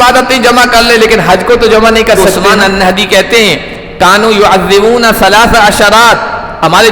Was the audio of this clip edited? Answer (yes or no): yes